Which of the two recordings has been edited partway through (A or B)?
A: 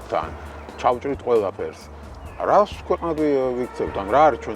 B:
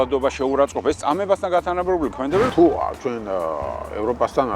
B